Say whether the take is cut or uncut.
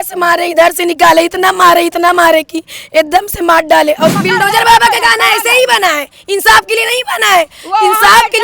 cut